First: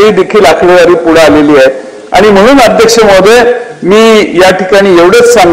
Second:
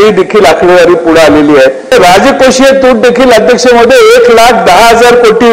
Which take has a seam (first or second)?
second